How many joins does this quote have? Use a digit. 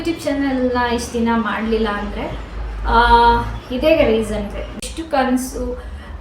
1